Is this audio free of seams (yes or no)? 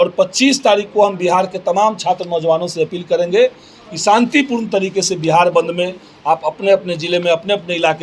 yes